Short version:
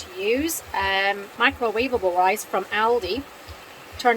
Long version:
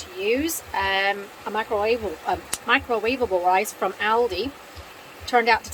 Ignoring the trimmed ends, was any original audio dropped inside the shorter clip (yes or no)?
yes